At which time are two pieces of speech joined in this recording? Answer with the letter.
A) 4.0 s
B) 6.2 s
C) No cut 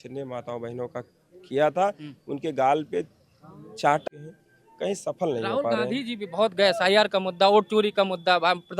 A